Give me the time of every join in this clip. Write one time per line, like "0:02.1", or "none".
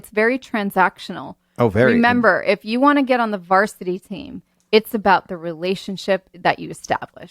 0:06.3